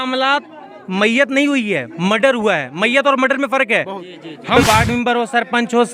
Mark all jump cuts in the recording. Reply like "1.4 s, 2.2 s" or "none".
4.6 s